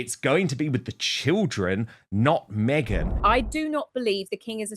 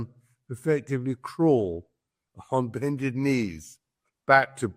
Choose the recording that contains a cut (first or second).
first